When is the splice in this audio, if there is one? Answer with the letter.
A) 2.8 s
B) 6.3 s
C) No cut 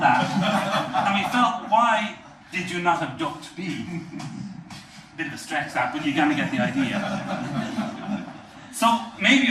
A